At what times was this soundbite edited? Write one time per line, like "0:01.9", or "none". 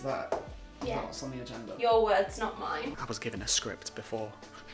0:02.9